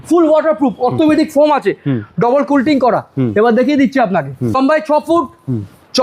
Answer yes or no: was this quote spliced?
yes